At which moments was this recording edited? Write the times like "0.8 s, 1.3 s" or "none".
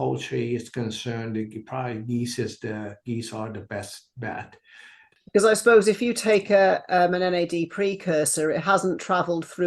5.0 s